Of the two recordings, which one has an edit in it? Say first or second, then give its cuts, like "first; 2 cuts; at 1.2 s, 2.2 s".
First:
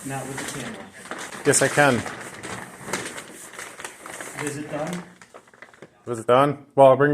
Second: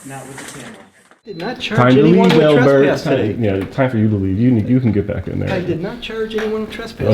second; 1 cut; at 1.5 s